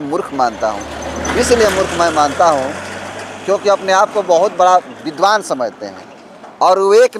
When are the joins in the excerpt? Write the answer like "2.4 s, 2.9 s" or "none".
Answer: none